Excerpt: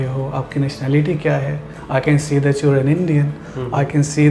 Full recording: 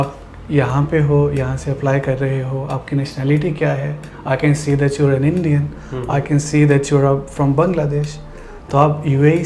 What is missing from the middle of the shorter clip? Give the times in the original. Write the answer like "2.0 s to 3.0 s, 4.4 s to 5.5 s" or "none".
none